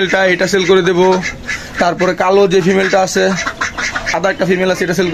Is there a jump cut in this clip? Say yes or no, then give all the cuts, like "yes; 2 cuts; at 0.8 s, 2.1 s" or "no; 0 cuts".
yes; 1 cut; at 4.1 s